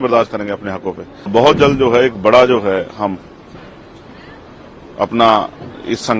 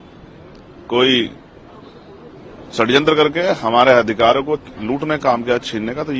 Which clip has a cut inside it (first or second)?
first